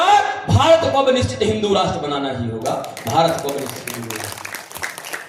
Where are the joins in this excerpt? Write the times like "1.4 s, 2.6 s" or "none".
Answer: none